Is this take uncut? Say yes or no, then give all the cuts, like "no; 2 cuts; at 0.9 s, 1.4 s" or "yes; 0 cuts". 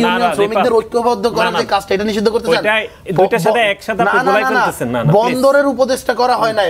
yes; 0 cuts